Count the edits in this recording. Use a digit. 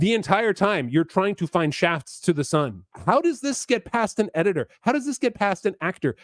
1